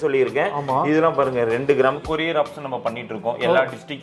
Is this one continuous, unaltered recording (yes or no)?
no